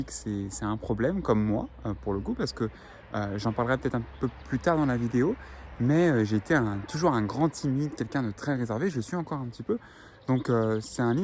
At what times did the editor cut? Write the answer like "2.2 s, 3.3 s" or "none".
none